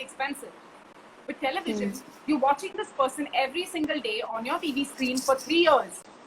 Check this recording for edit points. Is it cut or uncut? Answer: cut